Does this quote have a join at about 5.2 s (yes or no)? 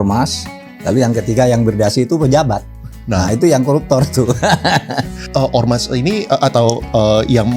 yes